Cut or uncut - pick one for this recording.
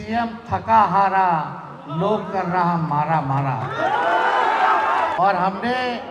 cut